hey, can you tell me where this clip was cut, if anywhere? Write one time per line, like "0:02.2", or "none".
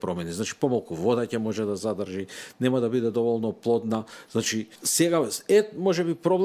0:04.8